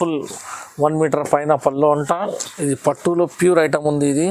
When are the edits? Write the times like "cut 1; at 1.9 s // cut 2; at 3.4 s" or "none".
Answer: cut 1; at 2.4 s